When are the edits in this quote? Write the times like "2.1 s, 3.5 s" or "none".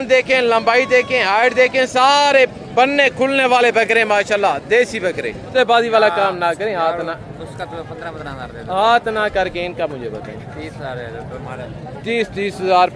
5.5 s